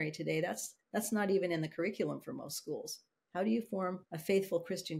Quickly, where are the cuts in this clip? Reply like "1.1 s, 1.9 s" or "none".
4.1 s